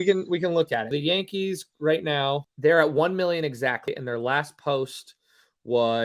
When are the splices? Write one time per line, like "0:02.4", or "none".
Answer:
0:00.9
0:02.5
0:03.9